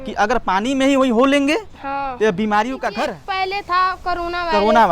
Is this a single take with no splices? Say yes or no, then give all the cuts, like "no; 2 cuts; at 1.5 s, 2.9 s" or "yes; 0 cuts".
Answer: no; 1 cut; at 3.0 s